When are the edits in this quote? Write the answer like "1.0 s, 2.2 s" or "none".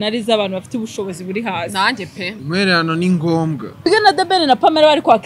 2.3 s, 3.9 s